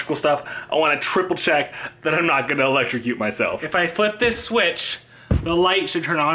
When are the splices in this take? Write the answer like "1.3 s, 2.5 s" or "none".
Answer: 3.6 s